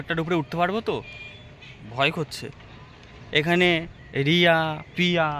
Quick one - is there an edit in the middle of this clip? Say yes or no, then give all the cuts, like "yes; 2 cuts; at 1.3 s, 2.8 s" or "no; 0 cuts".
no; 0 cuts